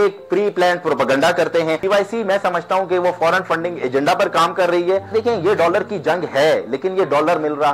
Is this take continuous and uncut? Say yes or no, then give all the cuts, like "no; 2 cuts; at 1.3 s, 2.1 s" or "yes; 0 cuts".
no; 2 cuts; at 1.8 s, 5.1 s